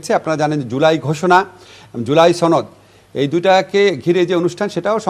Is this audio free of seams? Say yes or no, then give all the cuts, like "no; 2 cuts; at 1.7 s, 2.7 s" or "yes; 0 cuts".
yes; 0 cuts